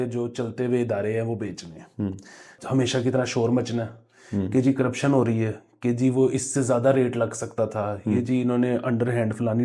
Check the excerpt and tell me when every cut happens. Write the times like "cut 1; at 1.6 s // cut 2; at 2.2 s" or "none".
cut 1; at 2.5 s